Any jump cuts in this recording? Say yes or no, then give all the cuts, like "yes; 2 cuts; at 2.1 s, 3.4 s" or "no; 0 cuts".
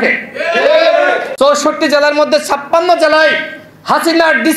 yes; 1 cut; at 1.3 s